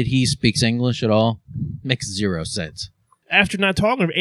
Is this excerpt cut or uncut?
cut